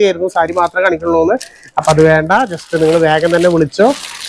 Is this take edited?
no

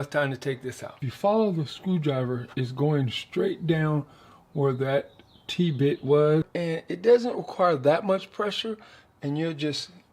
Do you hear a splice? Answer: yes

